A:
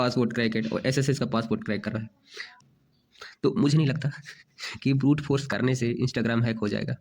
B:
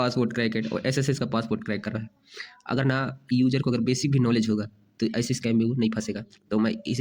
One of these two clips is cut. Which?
A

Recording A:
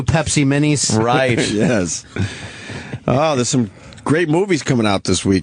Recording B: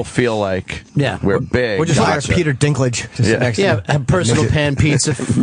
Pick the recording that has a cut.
A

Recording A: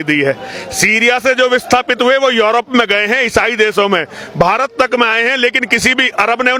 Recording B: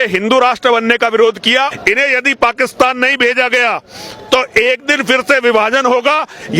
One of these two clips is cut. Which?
B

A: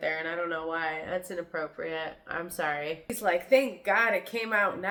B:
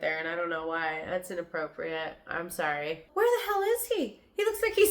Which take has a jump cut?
B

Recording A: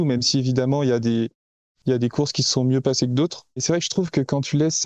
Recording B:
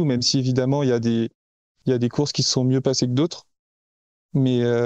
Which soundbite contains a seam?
A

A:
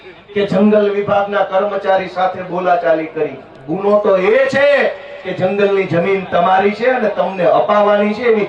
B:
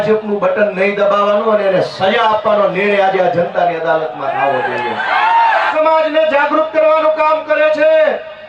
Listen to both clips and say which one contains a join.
B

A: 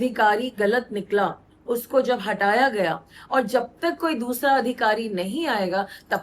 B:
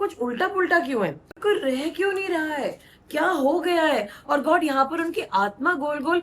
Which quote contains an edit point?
B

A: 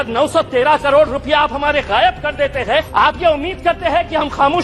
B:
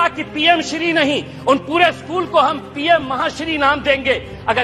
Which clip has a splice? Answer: A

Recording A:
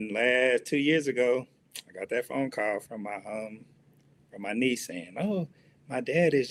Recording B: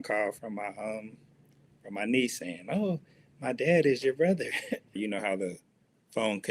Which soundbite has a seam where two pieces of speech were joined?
B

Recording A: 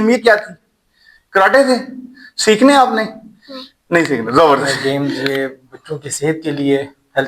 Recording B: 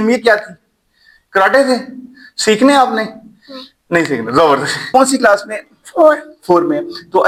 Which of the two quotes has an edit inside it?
A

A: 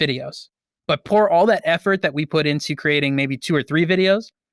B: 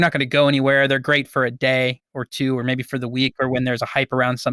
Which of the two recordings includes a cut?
A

